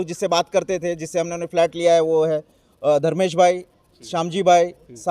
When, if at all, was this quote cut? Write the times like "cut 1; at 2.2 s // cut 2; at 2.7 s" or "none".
none